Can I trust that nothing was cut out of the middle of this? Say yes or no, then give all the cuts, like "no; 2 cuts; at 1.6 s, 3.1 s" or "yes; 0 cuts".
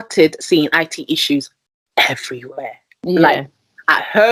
yes; 0 cuts